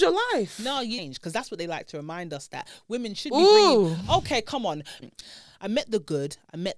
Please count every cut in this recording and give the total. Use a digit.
2